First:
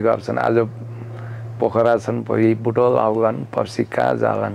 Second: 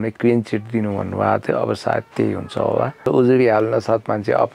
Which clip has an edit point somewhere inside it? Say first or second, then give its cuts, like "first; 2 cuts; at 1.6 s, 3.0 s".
second; 1 cut; at 3.0 s